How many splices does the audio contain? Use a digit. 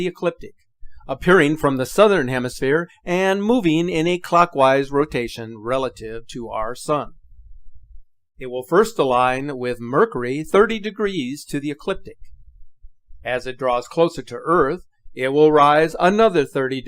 0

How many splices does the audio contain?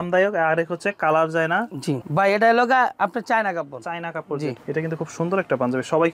2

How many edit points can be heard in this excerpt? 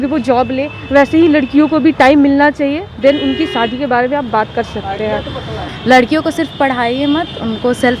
1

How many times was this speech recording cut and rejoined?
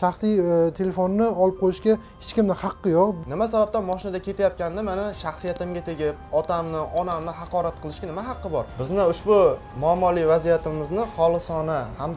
2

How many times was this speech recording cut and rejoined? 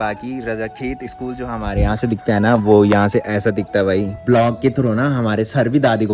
1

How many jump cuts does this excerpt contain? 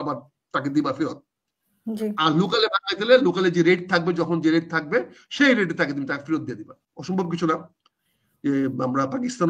1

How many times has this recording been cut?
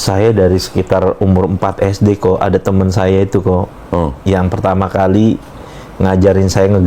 0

